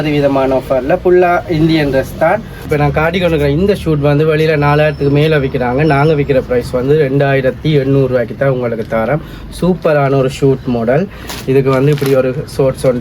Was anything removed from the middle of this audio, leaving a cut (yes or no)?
yes